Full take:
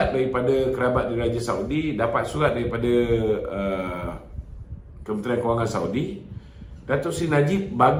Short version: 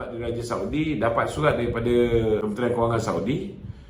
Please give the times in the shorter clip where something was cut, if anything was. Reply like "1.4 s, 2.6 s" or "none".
2.4 s